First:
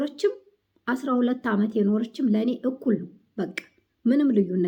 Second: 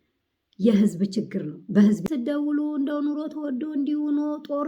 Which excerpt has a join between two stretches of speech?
second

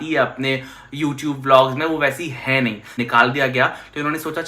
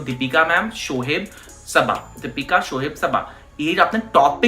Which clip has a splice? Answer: first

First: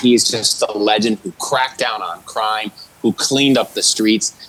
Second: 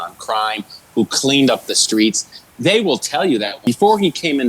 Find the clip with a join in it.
second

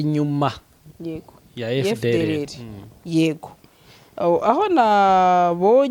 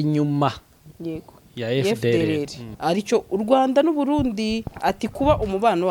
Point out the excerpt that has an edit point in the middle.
second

